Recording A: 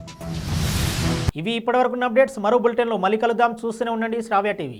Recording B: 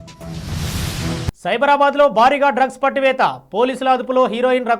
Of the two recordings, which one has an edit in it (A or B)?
B